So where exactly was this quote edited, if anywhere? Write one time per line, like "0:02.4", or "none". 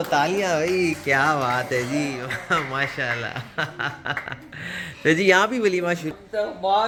none

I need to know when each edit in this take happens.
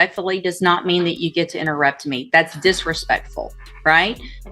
none

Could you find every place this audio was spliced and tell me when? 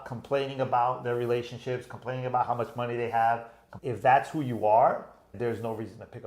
0:03.8
0:05.3

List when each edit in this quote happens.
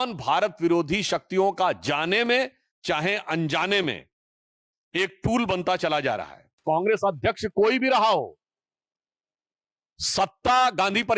0:06.5

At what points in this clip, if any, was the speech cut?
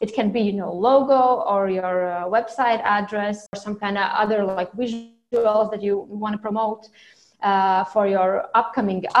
0:03.6

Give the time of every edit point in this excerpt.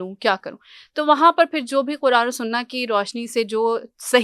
none

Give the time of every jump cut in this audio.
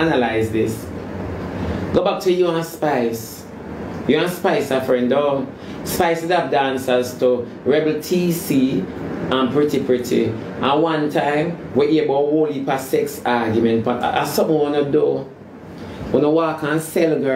none

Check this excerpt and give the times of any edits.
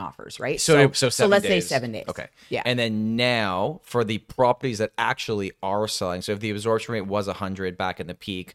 none

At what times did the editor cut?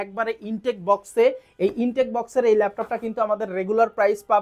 none

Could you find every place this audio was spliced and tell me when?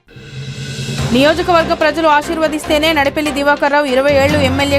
0:01.1

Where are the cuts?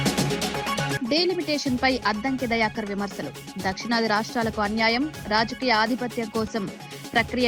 0:00.9

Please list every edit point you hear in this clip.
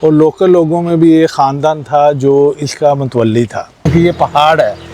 0:03.9

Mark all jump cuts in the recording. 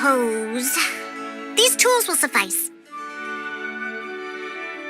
0:02.5

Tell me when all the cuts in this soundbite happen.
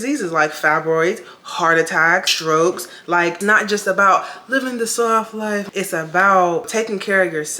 0:02.3
0:03.4
0:05.6
0:06.7

